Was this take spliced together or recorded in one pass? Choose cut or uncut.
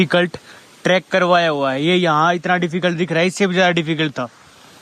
uncut